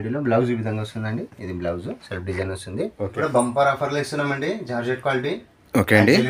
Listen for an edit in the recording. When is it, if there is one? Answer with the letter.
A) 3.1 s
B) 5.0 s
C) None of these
A